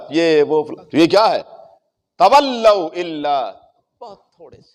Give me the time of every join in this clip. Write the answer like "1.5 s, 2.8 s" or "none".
none